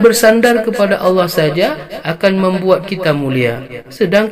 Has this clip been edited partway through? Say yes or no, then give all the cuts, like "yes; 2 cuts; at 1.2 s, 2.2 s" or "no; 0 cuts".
no; 0 cuts